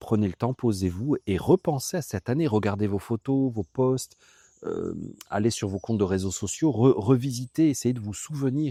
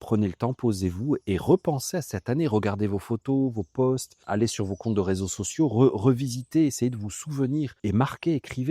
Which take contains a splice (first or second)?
second